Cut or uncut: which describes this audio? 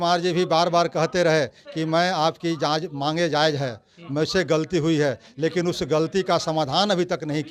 uncut